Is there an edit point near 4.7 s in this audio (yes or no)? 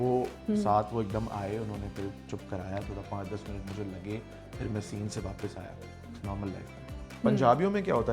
no